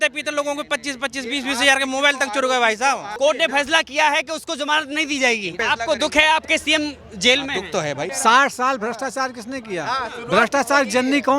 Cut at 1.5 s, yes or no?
no